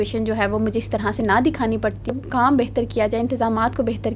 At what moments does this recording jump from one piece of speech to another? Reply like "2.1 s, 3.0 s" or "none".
2.1 s